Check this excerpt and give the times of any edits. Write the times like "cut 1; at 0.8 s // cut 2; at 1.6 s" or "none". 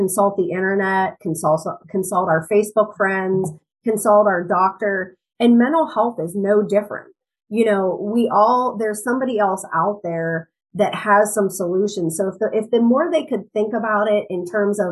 none